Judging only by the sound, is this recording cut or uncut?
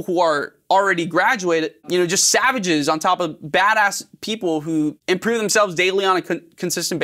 cut